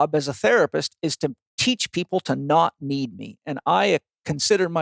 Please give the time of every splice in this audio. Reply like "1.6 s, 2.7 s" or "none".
none